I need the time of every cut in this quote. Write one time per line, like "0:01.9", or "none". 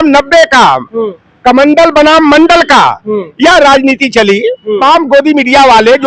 0:04.8